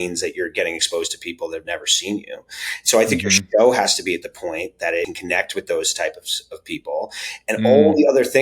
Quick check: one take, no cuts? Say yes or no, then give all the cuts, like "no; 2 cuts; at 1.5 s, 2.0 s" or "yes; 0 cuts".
no; 1 cut; at 5.1 s